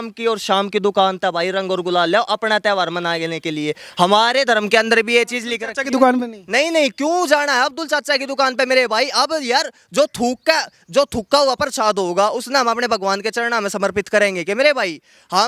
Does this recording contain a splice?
no; 0 cuts

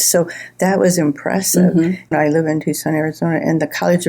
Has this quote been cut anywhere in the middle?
yes; 1 cut; at 2.1 s

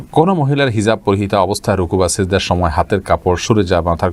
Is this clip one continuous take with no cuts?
yes; 0 cuts

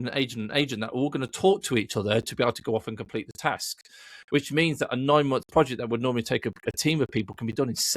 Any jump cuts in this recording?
no; 0 cuts

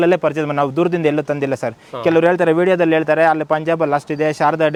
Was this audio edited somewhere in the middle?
no; 0 cuts

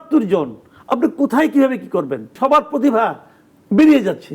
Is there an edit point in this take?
yes; 1 cut; at 2.3 s

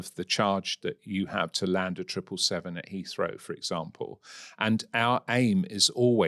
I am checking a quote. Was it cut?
no; 0 cuts

